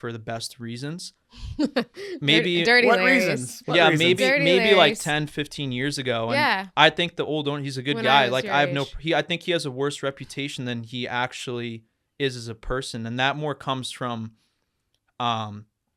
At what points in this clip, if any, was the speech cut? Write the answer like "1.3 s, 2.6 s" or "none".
none